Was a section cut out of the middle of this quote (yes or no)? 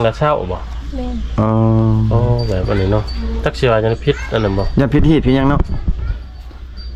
no